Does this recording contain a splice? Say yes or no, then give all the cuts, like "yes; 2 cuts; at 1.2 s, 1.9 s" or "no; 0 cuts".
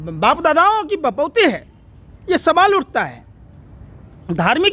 no; 0 cuts